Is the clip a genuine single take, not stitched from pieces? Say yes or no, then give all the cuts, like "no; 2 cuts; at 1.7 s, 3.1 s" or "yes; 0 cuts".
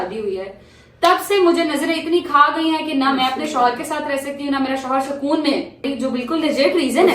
no; 1 cut; at 5.8 s